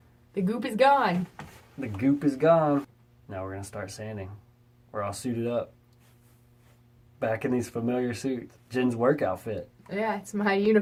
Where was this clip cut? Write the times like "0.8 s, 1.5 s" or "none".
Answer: none